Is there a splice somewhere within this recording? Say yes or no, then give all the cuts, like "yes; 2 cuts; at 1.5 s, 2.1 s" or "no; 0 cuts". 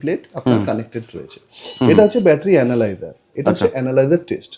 no; 0 cuts